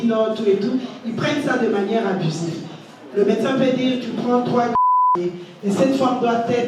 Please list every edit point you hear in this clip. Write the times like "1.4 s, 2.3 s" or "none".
4.9 s